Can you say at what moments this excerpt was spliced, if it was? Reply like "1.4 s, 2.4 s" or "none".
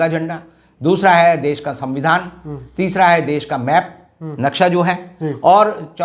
none

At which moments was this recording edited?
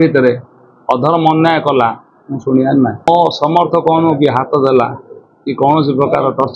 3.1 s

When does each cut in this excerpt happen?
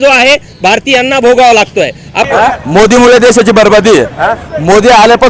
2.1 s

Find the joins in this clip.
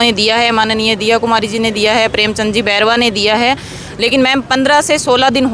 none

